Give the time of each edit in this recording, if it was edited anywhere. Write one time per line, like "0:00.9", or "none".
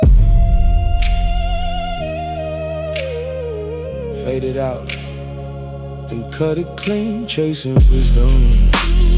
0:03.1